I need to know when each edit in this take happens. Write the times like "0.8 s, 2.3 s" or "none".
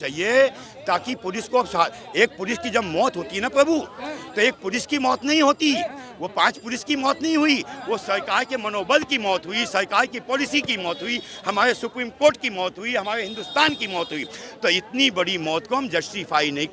none